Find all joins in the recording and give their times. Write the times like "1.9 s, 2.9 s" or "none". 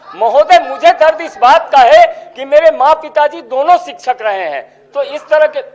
none